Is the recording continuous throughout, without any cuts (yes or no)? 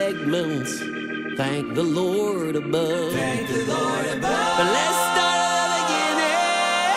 yes